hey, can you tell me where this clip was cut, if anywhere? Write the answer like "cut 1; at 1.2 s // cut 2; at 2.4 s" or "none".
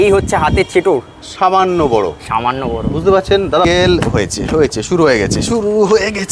cut 1; at 3.6 s

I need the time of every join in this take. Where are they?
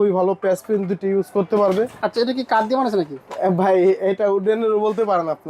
cut 1; at 1.9 s

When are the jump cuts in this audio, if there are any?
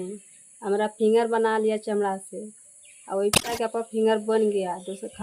cut 1; at 3.6 s

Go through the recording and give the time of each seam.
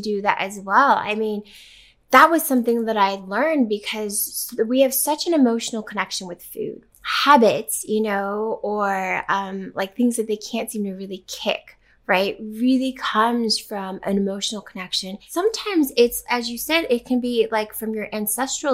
cut 1; at 6.9 s // cut 2; at 15.2 s

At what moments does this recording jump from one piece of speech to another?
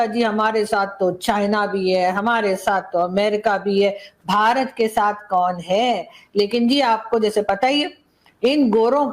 none

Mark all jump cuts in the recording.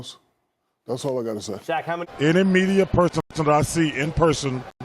cut 1; at 2.2 s

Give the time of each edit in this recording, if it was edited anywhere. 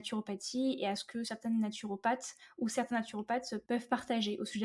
cut 1; at 3.6 s

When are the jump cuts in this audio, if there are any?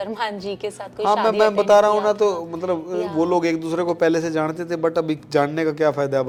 none

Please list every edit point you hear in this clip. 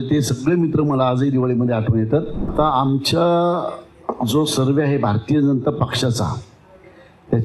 cut 1; at 2.5 s

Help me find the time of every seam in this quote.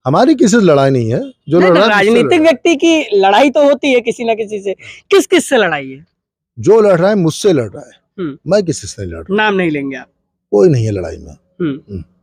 none

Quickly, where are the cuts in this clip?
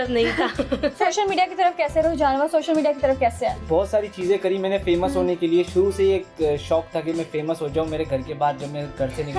cut 1; at 1.0 s // cut 2; at 3.6 s

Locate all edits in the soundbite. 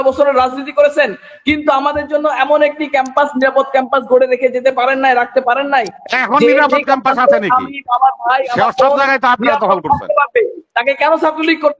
none

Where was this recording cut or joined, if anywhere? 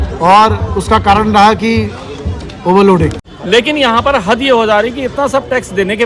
cut 1; at 3.2 s

